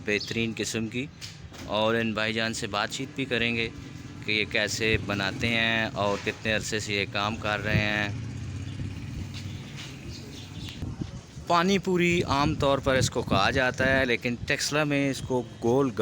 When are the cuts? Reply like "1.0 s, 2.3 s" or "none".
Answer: 10.8 s